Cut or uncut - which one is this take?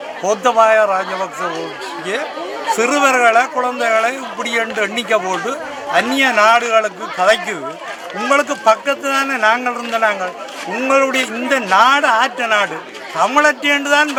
uncut